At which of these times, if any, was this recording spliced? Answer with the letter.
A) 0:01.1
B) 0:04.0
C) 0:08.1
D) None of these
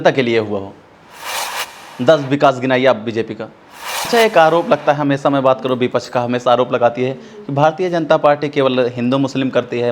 B